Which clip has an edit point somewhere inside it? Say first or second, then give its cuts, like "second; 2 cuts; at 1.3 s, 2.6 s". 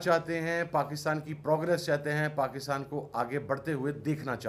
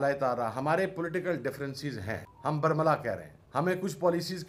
second; 2 cuts; at 2.3 s, 3.3 s